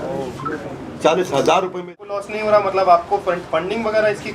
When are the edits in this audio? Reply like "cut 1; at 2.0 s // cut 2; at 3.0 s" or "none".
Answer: cut 1; at 1.9 s

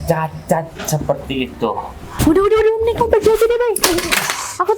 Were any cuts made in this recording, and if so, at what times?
cut 1; at 2.0 s

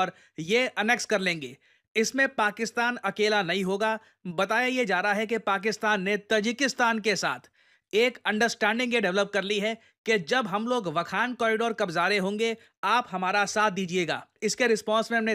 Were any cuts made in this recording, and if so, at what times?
none

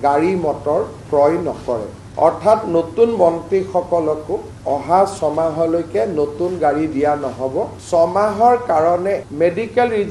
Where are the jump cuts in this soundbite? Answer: cut 1; at 7.8 s

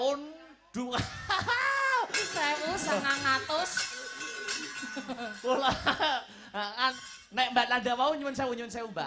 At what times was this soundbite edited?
cut 1; at 7.0 s

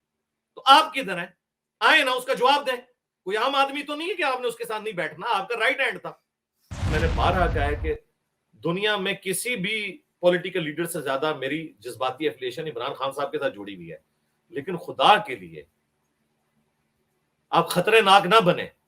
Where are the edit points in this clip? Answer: cut 1; at 6.9 s

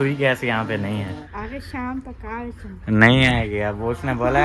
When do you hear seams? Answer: cut 1; at 1.2 s

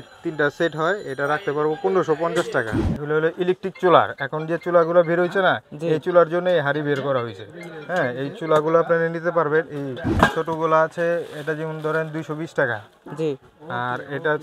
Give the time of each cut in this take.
cut 1; at 2.8 s // cut 2; at 10.0 s

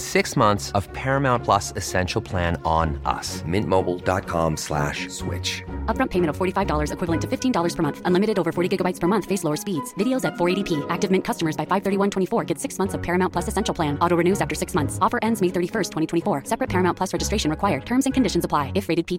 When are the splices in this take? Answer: none

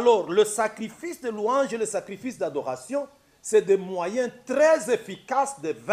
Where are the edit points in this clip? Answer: none

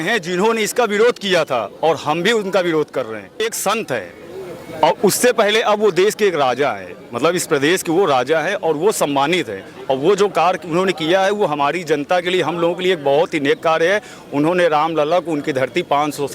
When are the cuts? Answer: cut 1; at 3.4 s

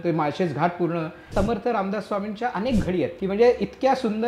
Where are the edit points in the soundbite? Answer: cut 1; at 1.3 s // cut 2; at 3.2 s

